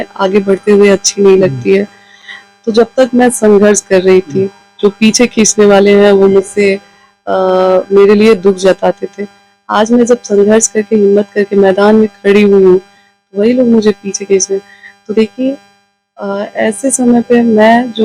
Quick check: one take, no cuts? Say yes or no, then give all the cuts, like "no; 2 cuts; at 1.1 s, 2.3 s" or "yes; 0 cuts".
yes; 0 cuts